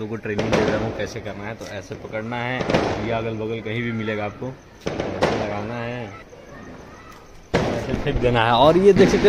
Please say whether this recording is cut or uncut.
cut